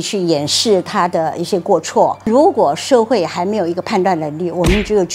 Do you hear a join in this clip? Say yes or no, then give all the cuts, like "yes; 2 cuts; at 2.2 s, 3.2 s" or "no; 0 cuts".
yes; 1 cut; at 2.3 s